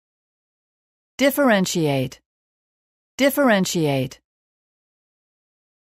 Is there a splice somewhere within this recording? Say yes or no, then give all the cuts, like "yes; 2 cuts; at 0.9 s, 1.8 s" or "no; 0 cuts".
no; 0 cuts